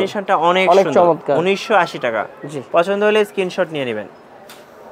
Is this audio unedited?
yes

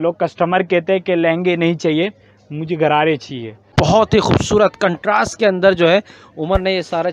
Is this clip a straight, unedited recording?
no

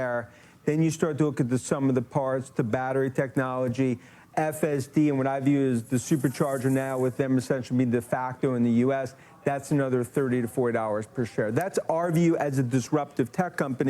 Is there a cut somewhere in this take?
no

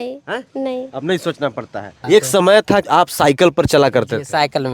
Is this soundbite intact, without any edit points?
no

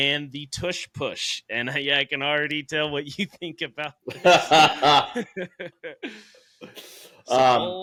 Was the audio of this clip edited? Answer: no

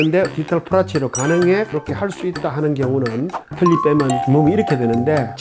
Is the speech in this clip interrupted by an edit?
yes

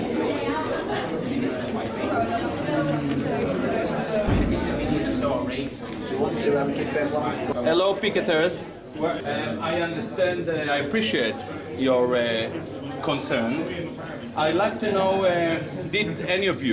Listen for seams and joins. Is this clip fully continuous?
yes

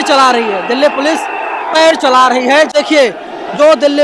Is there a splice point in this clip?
yes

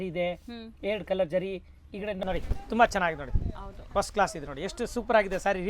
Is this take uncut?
no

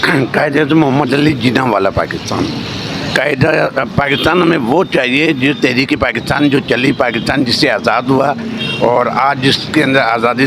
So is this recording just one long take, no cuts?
yes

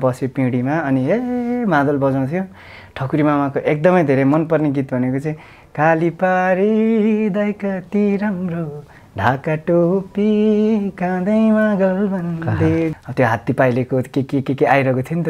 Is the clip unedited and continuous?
no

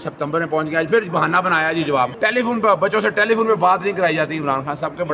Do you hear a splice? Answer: yes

